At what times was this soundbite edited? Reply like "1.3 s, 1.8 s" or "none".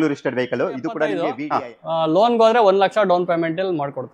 1.4 s